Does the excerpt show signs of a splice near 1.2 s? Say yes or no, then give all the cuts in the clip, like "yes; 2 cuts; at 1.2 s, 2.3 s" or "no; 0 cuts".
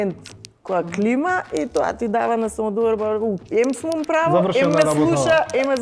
no; 0 cuts